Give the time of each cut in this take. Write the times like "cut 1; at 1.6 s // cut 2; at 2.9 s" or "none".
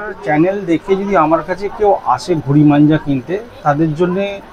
none